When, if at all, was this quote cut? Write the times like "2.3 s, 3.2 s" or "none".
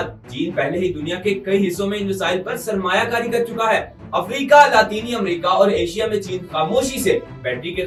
none